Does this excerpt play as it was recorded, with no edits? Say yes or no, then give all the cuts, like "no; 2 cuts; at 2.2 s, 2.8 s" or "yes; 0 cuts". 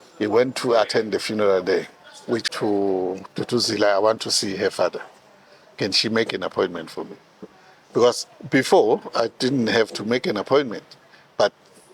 no; 1 cut; at 2.5 s